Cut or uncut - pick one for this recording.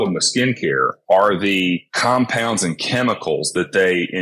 cut